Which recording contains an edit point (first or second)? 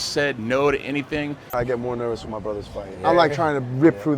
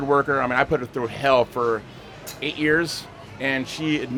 first